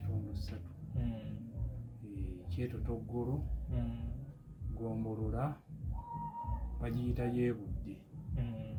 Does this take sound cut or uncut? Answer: uncut